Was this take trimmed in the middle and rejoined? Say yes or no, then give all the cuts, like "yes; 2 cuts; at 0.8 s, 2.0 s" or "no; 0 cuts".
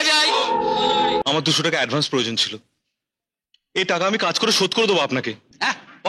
yes; 1 cut; at 1.2 s